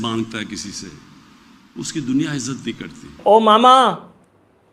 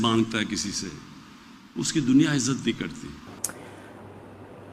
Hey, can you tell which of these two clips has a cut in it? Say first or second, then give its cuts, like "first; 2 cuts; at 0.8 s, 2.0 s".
first; 1 cut; at 3.2 s